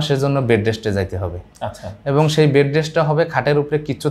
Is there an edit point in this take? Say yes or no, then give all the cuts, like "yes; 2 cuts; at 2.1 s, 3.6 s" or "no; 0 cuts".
no; 0 cuts